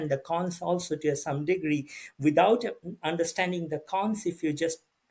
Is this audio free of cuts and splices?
yes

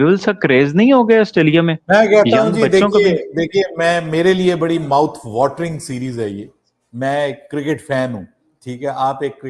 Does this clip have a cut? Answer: no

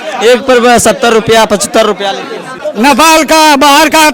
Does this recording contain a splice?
yes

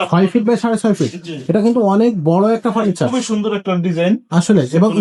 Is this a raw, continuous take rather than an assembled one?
yes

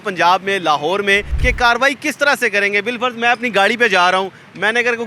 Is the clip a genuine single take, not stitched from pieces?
no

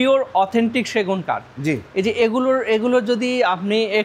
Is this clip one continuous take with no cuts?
yes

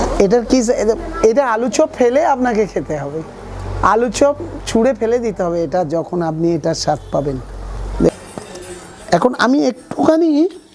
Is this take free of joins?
no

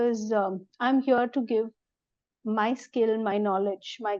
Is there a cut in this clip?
no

